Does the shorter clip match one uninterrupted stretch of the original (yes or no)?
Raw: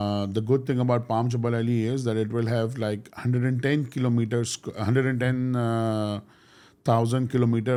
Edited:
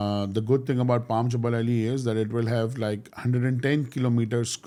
yes